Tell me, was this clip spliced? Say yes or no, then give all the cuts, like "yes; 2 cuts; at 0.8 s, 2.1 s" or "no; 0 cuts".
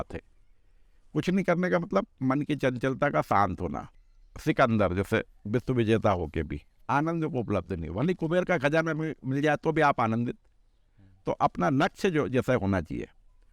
yes; 1 cut; at 3.9 s